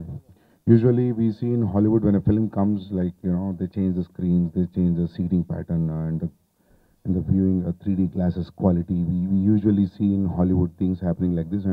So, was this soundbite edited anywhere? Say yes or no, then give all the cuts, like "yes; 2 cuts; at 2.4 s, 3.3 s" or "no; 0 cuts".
no; 0 cuts